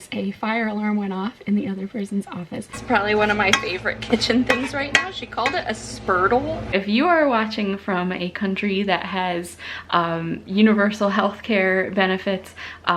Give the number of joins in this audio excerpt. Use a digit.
2